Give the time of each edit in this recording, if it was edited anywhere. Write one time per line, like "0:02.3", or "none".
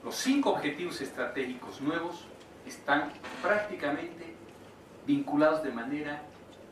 none